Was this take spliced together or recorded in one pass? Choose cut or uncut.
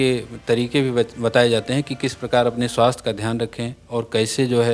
uncut